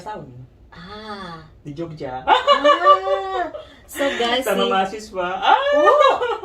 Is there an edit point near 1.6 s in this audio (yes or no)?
no